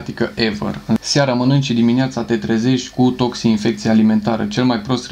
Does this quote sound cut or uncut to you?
cut